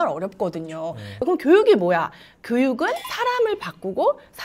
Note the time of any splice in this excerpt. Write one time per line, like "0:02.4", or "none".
0:01.1